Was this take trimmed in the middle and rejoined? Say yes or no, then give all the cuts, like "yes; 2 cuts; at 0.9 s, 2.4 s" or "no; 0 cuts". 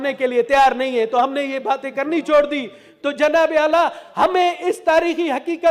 no; 0 cuts